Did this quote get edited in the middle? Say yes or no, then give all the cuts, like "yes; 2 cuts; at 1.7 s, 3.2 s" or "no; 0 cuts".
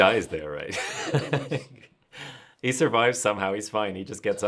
no; 0 cuts